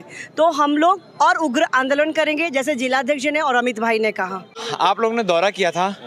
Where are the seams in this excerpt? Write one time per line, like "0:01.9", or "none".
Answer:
none

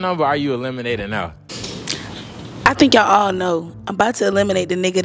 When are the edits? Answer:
none

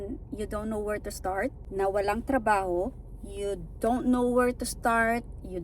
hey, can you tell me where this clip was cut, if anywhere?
0:01.6

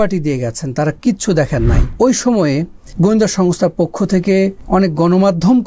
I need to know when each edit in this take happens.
0:01.9
0:04.6

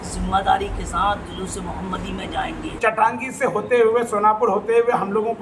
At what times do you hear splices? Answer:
0:02.7

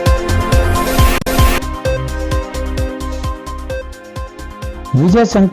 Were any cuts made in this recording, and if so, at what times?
0:01.1

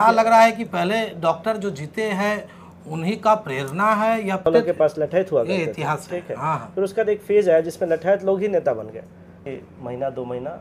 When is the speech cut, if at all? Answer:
0:04.5
0:09.5

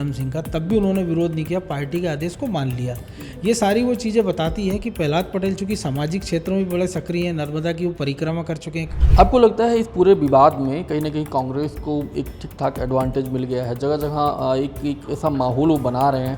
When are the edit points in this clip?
0:09.0

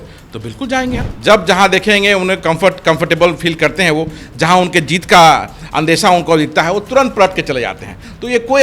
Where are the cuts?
0:01.1

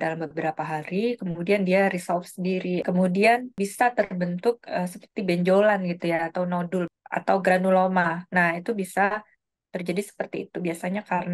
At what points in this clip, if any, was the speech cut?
0:02.8
0:03.7
0:07.0

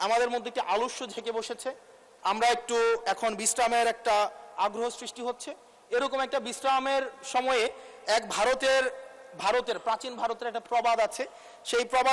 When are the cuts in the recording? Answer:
none

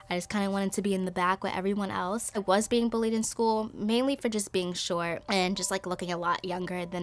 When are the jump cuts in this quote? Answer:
0:02.4
0:05.2

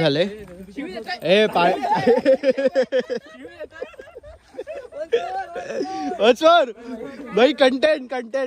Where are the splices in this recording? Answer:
none

